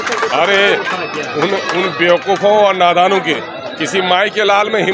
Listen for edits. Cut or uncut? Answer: uncut